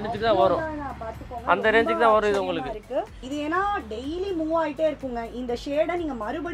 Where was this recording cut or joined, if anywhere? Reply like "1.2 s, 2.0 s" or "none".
3.2 s